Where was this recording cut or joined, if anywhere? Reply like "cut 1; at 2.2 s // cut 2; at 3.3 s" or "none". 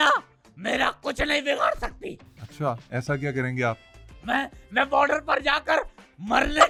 none